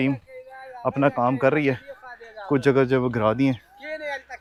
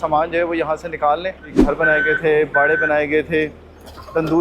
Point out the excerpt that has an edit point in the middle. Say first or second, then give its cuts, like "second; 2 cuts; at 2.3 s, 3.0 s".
second; 1 cut; at 1.5 s